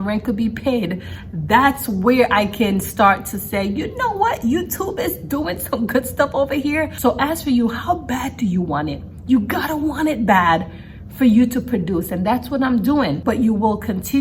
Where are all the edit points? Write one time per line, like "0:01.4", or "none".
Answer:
0:06.9
0:13.2